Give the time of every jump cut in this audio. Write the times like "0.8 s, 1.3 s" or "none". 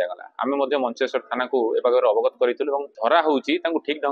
2.9 s